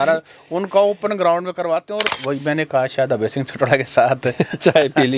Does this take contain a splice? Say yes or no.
yes